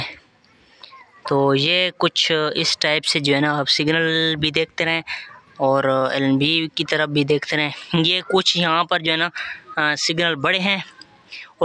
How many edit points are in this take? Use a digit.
0